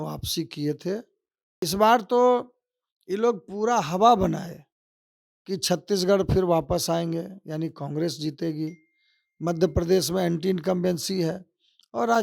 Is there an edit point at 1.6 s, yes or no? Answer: yes